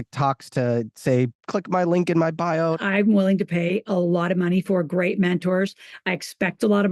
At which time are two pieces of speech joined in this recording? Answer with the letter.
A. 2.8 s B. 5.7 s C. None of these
A